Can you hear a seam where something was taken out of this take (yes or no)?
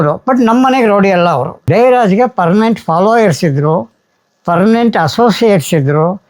yes